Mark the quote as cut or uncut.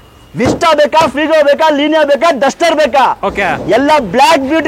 uncut